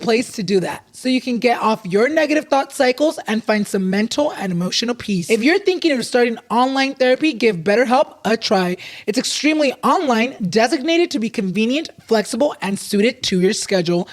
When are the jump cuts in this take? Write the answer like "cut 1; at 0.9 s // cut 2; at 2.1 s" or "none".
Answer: cut 1; at 5.2 s